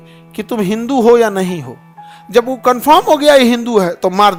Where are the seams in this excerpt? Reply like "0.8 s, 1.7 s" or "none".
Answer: none